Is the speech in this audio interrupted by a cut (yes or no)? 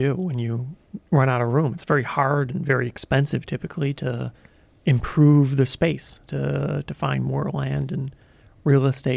no